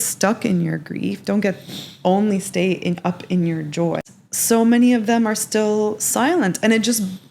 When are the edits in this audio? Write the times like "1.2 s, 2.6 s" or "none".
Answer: 4.0 s